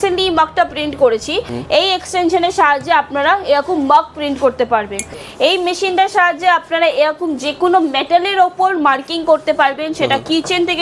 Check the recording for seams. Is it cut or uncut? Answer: cut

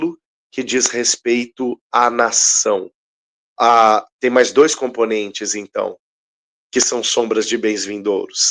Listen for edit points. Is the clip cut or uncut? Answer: uncut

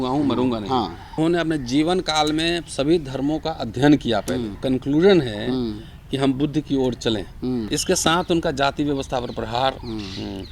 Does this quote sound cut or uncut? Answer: cut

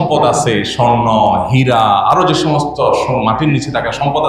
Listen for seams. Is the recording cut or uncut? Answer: uncut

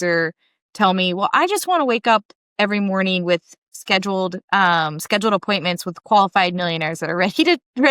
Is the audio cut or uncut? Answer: uncut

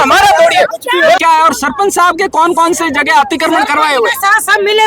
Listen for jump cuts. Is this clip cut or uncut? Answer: cut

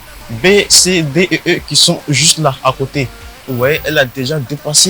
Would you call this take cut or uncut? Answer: uncut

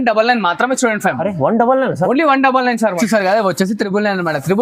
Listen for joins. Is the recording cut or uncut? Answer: cut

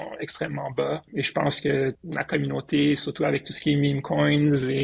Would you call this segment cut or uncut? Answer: cut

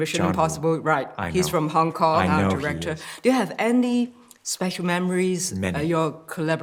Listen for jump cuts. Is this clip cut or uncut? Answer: uncut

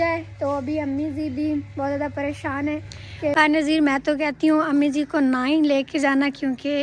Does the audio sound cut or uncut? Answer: cut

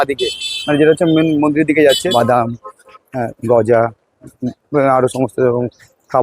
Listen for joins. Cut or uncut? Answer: cut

